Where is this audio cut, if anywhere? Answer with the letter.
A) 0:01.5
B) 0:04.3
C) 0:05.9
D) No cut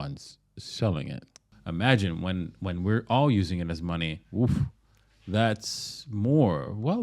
A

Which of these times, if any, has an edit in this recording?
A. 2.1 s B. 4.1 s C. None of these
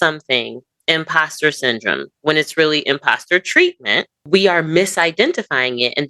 B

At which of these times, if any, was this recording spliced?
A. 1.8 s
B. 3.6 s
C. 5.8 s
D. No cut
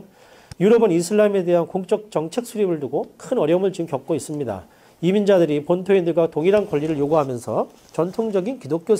A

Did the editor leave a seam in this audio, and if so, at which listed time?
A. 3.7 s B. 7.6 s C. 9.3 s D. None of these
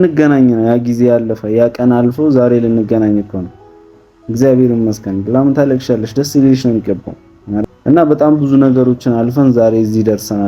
B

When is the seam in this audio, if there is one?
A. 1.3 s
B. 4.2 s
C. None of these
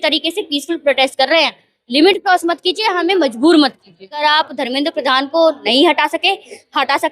B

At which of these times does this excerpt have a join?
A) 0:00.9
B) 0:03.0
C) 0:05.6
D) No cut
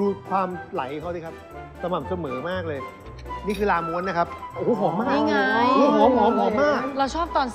D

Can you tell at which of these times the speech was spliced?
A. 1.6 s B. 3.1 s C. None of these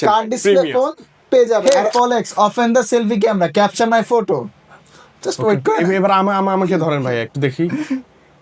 A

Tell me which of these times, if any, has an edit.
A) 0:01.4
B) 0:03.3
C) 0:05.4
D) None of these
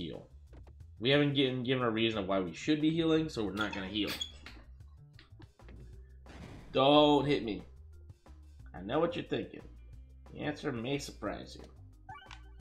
C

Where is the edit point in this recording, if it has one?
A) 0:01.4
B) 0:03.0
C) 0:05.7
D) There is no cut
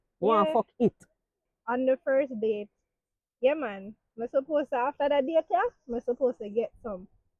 A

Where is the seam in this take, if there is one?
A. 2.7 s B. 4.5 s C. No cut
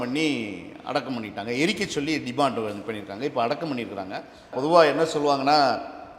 B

